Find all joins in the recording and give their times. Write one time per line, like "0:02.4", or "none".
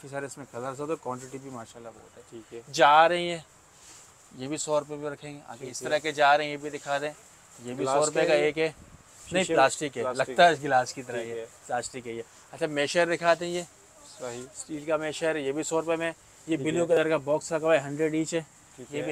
none

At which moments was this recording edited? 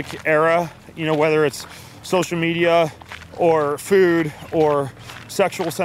none

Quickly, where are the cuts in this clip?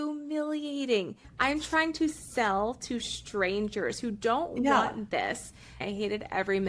0:01.2
0:05.8

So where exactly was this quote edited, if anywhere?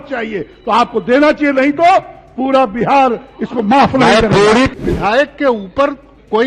0:04.7

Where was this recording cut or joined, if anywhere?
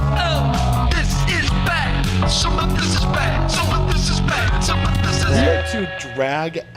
none

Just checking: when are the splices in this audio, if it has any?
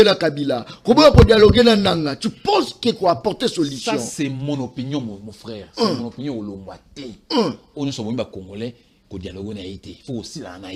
none

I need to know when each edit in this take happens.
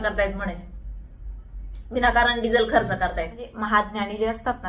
0:03.5

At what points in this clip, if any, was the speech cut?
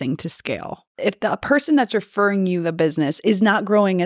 0:01.0

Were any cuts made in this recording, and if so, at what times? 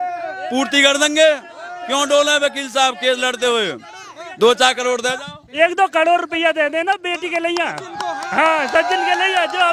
none

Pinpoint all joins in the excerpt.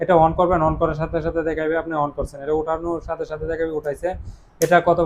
none

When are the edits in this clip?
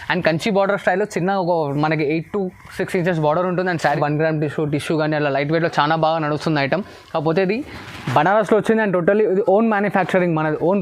0:03.8

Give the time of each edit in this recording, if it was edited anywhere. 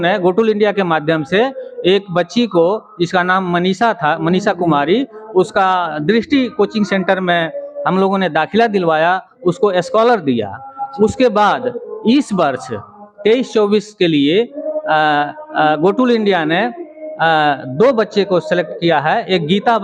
none

